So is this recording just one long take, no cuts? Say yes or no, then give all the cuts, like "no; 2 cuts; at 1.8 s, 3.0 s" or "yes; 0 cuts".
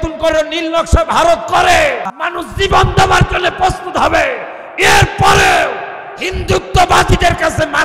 no; 1 cut; at 2.2 s